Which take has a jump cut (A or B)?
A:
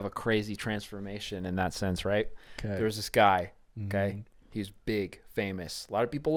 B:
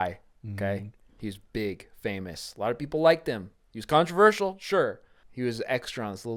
B